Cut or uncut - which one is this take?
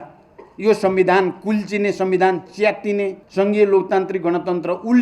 cut